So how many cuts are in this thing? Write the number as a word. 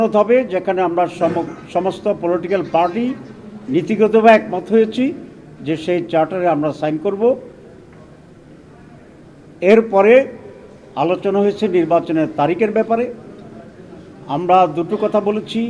zero